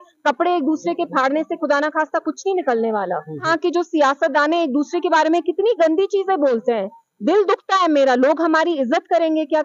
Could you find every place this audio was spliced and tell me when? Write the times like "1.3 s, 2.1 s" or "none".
3.5 s